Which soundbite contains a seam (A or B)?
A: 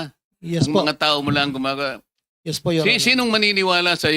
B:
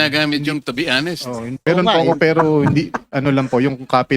B